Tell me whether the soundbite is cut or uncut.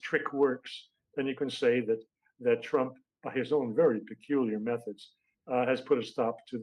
uncut